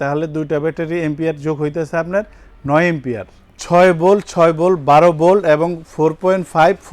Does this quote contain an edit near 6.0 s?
no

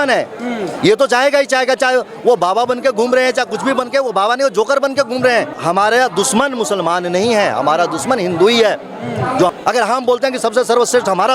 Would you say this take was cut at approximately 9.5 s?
yes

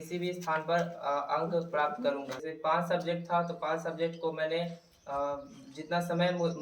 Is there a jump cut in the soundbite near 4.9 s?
no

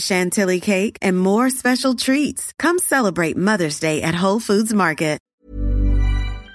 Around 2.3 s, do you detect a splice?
no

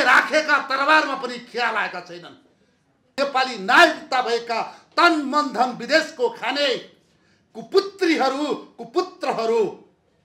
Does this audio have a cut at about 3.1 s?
yes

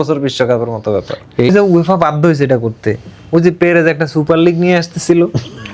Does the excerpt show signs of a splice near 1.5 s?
yes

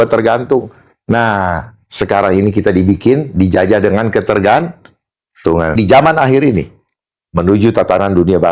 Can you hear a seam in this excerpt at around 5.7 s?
yes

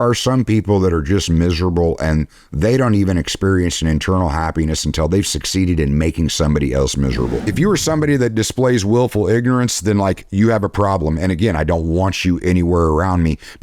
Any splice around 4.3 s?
no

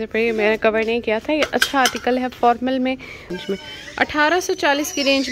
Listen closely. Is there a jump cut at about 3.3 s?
yes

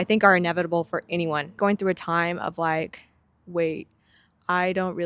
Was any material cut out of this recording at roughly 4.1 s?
no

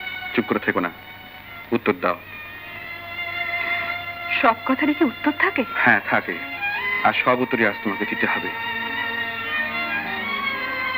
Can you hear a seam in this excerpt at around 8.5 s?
no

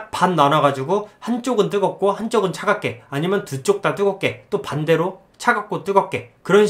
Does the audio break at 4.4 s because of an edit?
no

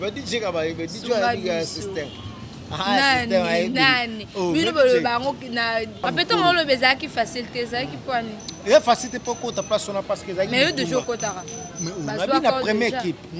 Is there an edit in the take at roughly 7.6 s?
no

